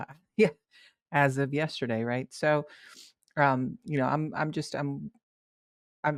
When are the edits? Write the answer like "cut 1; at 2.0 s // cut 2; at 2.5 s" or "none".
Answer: none